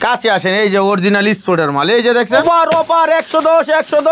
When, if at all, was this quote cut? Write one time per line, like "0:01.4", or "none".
0:02.4